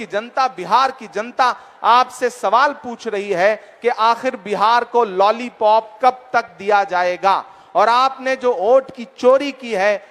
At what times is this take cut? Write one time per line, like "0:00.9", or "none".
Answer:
none

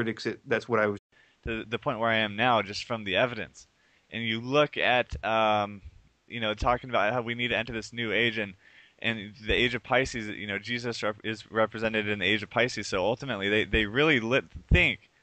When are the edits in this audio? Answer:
none

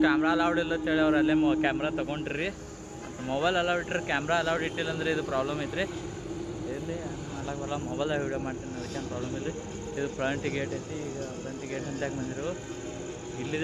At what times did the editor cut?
none

